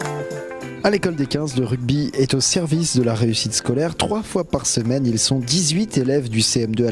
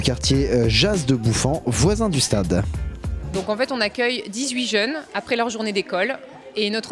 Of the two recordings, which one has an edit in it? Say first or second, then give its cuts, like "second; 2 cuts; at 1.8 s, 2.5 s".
second; 1 cut; at 4.7 s